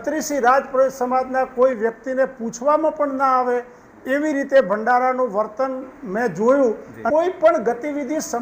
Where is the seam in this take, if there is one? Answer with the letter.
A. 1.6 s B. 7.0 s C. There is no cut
B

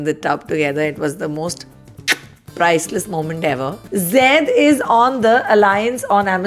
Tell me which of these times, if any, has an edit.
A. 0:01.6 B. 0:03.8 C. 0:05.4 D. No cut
B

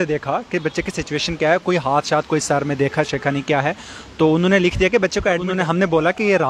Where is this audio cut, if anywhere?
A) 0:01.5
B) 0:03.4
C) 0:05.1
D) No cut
C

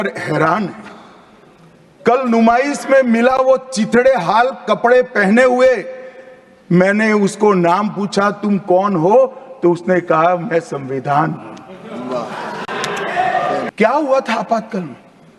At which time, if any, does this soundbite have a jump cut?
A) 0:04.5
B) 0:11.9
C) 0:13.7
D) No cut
C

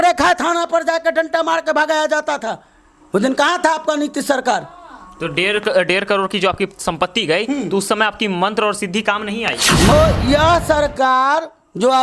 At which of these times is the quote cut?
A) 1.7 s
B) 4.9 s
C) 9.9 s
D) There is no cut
C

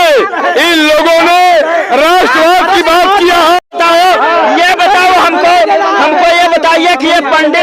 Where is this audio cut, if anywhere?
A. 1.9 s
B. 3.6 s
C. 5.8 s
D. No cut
B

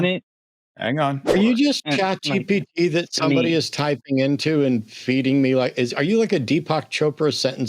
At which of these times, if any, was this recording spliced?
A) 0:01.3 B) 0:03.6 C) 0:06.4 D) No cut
A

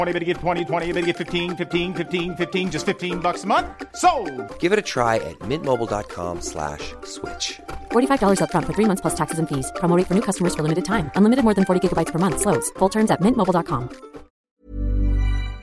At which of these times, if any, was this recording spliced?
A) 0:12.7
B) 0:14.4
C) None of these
B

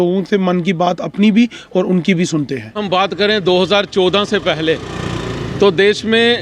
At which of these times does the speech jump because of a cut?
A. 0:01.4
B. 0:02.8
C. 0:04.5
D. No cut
B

